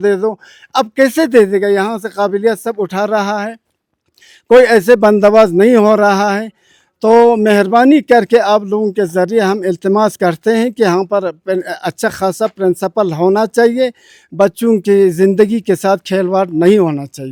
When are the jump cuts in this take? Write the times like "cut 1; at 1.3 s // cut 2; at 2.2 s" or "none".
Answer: none